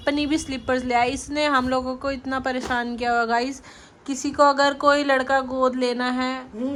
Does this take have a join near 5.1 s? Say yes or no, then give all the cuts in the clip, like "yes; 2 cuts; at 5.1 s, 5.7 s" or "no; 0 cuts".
no; 0 cuts